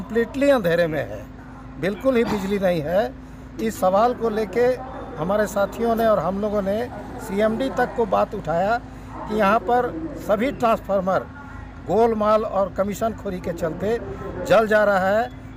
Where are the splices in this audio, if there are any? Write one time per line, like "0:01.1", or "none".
none